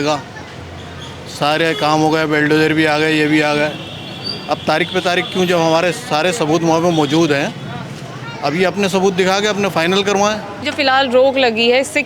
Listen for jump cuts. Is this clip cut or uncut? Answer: cut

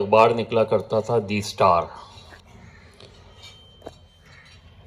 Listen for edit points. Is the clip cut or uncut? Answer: cut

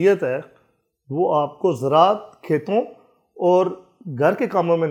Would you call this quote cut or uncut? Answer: uncut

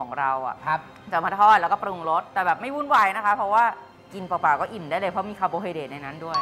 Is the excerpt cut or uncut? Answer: uncut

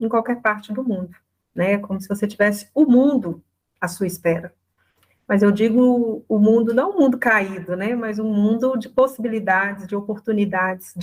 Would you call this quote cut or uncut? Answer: uncut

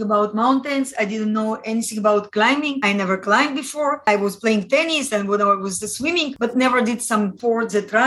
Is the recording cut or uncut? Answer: uncut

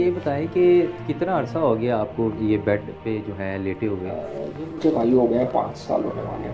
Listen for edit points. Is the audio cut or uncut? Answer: uncut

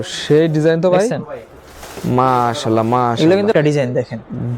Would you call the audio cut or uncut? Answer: cut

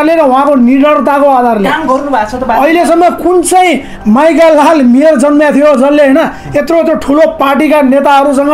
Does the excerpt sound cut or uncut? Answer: uncut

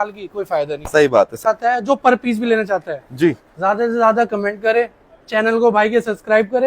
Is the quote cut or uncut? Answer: cut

